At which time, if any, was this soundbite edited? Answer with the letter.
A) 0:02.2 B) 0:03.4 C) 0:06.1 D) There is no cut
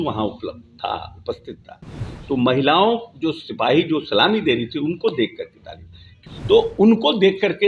C